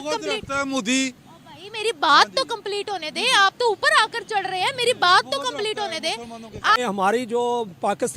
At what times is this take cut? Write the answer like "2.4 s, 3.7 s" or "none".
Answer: 6.8 s